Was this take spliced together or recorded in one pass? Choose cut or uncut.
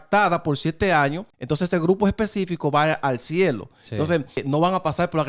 cut